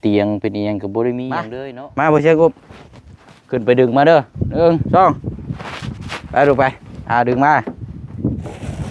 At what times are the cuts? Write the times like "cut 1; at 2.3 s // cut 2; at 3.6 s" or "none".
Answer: cut 1; at 1.5 s